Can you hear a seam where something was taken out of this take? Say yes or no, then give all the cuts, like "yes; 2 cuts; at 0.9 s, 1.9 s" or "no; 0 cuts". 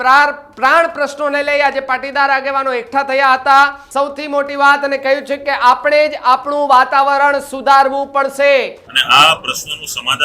yes; 2 cuts; at 3.8 s, 8.8 s